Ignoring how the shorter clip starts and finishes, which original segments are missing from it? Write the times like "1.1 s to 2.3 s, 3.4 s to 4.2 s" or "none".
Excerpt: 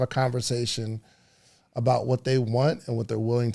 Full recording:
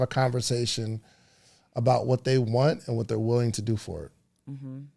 none